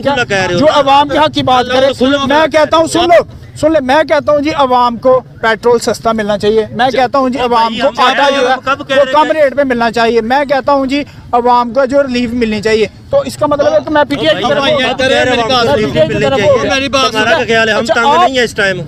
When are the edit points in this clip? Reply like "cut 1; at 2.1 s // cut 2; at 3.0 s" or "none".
none